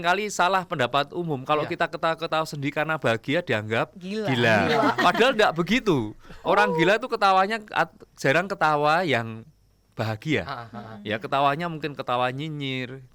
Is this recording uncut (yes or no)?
yes